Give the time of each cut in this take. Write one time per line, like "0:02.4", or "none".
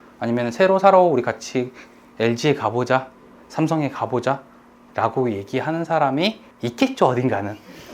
0:06.5